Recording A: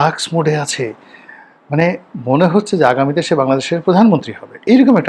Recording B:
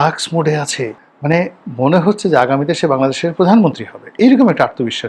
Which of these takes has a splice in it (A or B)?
B